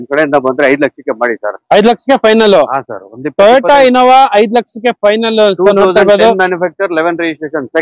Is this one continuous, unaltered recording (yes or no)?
yes